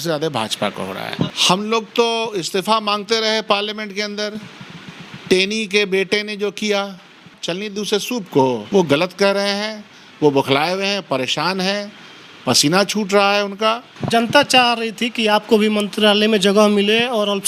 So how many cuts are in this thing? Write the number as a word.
four